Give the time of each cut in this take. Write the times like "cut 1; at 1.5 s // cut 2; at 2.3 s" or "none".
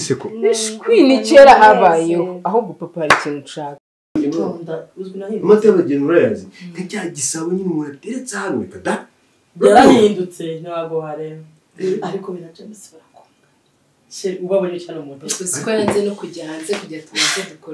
cut 1; at 4.2 s